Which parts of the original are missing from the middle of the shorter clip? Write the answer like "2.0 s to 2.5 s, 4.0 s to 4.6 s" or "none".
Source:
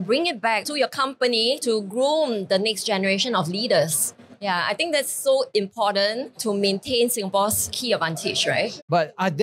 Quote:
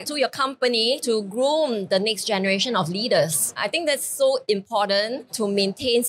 4.2 s to 4.7 s